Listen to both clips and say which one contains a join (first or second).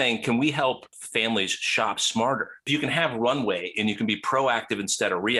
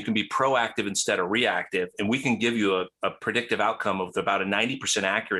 first